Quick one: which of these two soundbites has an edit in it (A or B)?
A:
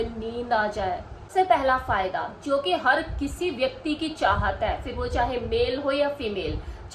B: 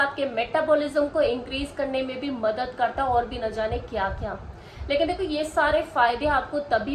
A